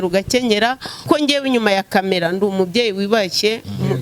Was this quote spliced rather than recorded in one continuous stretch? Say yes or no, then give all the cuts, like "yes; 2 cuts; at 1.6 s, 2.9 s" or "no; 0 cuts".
yes; 1 cut; at 1.0 s